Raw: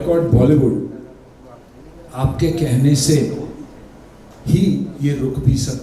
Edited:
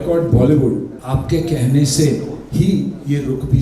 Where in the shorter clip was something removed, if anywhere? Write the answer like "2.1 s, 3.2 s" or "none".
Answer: 1.0 s, 2.4 s